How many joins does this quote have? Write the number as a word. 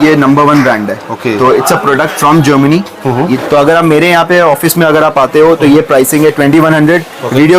one